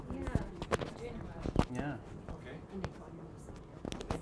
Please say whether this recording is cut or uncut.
uncut